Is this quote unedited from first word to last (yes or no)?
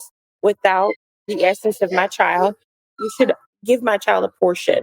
no